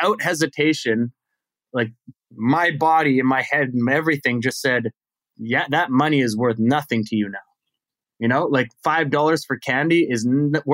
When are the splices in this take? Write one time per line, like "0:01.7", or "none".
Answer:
none

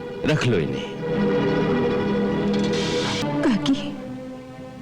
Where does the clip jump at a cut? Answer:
0:03.2

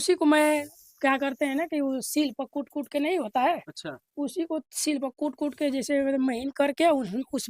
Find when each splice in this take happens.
none

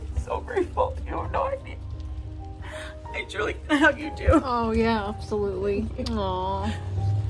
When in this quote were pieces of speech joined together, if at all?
none

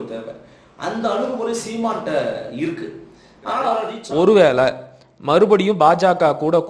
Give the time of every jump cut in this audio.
0:04.0

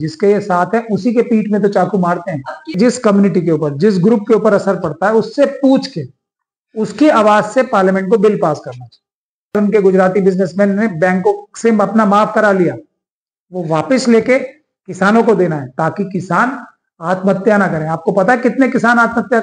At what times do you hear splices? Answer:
0:02.7
0:09.6

